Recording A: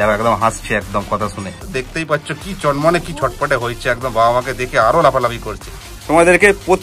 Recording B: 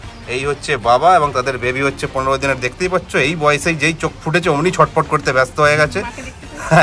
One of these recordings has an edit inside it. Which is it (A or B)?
A